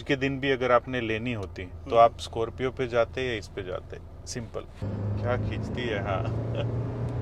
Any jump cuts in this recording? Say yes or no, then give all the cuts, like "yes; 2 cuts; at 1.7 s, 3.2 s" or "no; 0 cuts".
yes; 1 cut; at 4.8 s